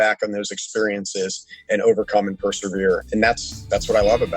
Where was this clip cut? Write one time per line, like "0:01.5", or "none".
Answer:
0:01.7
0:03.1